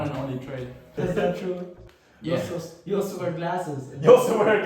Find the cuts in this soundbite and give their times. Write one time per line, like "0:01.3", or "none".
0:01.0